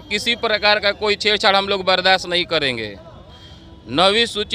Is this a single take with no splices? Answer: yes; 0 cuts

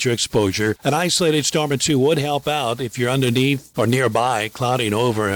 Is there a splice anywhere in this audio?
no; 0 cuts

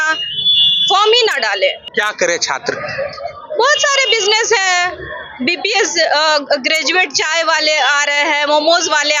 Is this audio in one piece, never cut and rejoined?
no; 1 cut; at 1.8 s

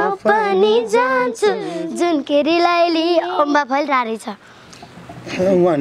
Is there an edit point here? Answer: no; 0 cuts

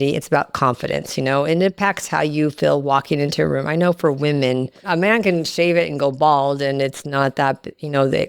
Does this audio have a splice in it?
no; 0 cuts

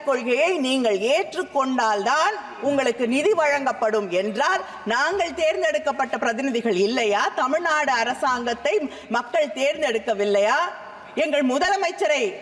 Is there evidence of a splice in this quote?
no; 0 cuts

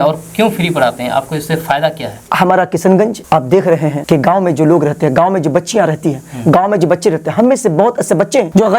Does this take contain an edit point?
yes; 1 cut; at 2.2 s

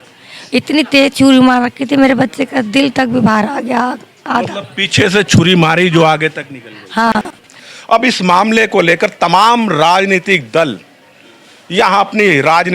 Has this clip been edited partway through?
yes; 1 cut; at 7.1 s

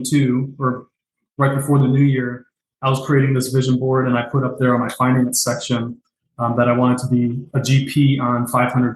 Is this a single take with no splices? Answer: yes; 0 cuts

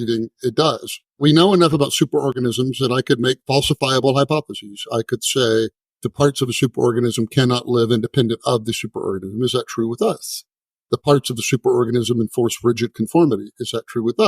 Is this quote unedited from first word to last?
no; 1 cut; at 1.1 s

